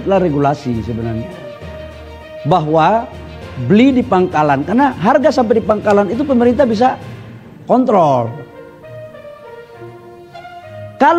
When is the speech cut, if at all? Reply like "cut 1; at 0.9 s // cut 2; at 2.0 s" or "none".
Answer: none